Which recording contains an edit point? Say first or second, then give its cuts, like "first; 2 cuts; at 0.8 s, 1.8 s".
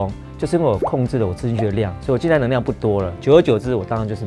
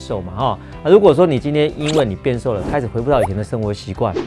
first; 1 cut; at 3.1 s